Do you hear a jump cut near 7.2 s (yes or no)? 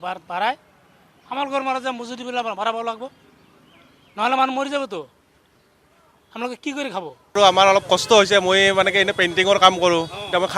yes